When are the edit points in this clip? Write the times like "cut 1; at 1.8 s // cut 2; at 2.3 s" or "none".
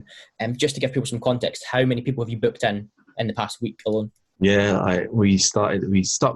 cut 1; at 4.2 s

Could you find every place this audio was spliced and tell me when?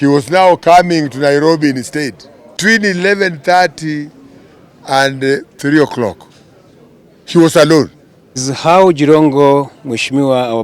cut 1; at 2.6 s // cut 2; at 8.5 s

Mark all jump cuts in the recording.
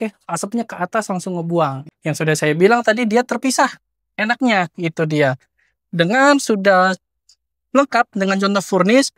cut 1; at 1.9 s

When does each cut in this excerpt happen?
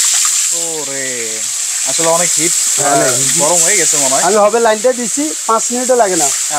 none

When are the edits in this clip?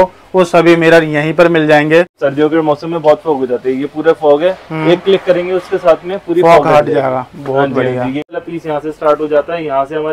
cut 1; at 2.2 s // cut 2; at 8.3 s

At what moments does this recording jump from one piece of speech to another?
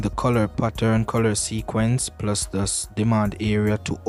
none

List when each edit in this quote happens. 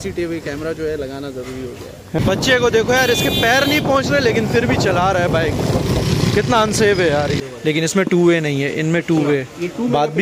cut 1; at 2.2 s // cut 2; at 7.4 s

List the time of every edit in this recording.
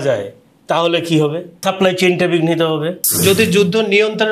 cut 1; at 1.5 s // cut 2; at 3.2 s

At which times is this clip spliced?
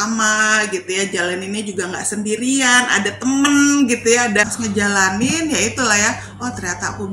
cut 1; at 4.5 s

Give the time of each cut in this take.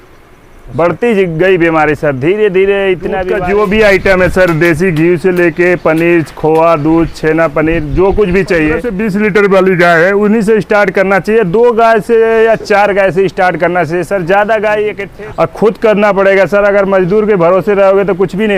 cut 1; at 3.3 s // cut 2; at 8.9 s // cut 3; at 15.0 s

